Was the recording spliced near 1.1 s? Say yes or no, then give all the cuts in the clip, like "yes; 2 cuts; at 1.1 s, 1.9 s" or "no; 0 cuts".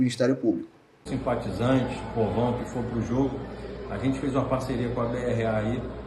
yes; 1 cut; at 1.1 s